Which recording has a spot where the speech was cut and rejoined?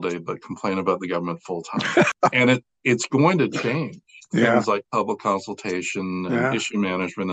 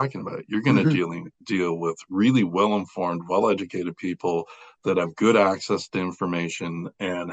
first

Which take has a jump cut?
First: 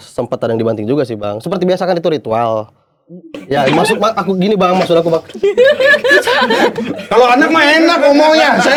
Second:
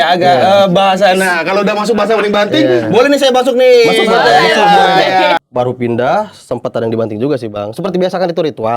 second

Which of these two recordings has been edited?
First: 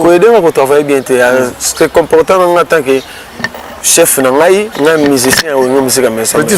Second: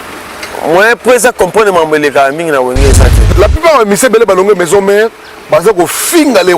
second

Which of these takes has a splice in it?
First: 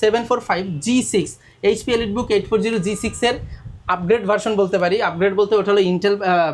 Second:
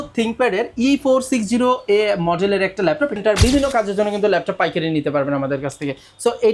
second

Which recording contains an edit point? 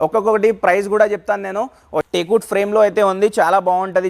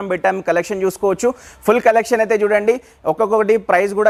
first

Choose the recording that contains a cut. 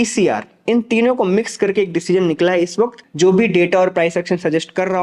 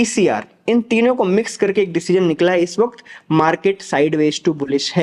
first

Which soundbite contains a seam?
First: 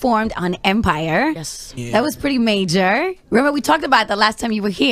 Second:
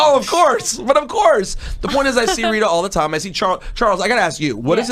second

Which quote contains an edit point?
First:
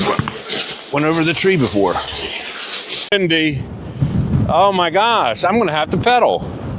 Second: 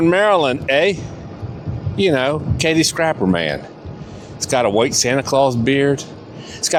first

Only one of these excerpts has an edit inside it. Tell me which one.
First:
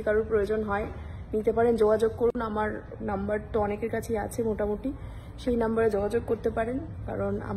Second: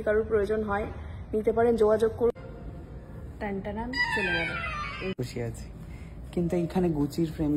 second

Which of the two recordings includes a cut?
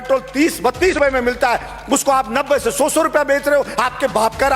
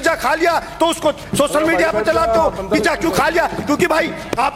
first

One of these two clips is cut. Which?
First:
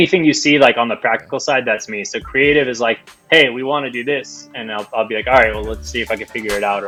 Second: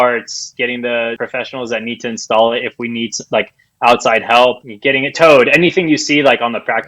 second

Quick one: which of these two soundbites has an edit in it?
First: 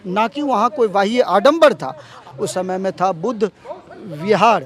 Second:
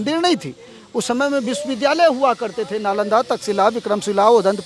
first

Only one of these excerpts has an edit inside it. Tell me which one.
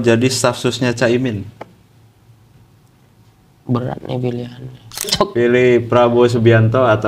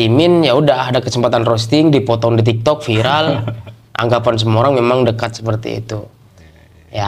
first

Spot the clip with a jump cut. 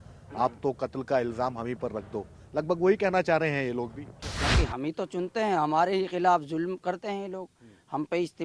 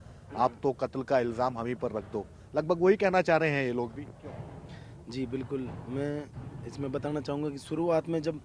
first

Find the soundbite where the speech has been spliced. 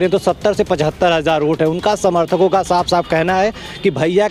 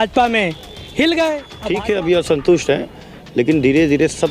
second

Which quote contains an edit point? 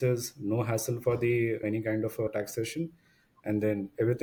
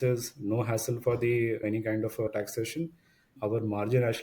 second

